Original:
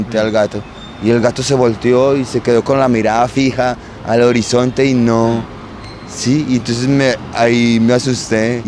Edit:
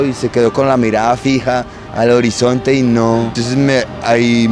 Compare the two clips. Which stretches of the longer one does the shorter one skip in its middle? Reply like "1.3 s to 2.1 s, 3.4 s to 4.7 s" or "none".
5.5 s to 6.7 s